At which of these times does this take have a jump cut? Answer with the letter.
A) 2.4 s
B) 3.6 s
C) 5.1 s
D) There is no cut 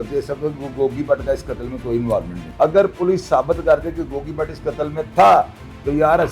A